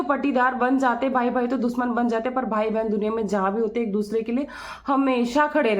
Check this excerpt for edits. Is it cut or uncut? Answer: uncut